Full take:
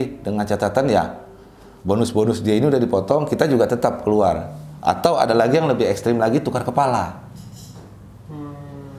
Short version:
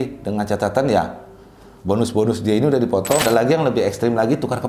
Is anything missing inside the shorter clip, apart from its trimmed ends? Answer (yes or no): yes